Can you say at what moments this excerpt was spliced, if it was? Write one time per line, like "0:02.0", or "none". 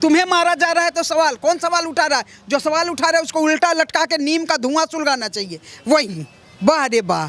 none